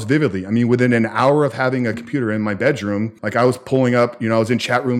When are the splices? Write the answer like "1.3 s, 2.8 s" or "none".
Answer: 3.2 s